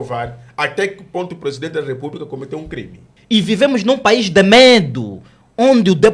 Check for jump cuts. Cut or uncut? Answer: cut